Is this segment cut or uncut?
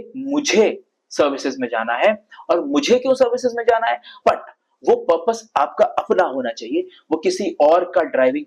cut